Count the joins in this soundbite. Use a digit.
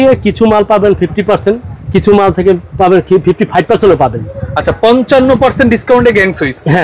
0